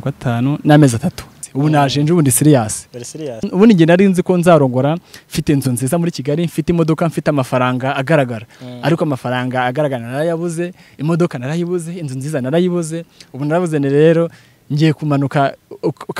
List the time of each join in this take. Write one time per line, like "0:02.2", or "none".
0:01.3
0:03.4